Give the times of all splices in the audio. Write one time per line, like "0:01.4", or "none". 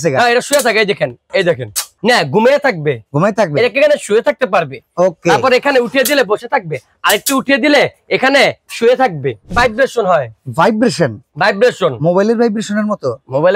0:01.9
0:09.5